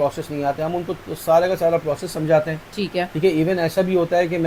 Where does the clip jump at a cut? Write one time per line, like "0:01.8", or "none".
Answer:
none